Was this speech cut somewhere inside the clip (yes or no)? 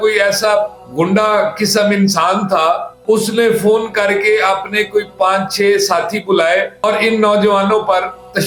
no